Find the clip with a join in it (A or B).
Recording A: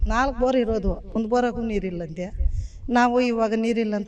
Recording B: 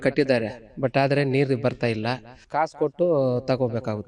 B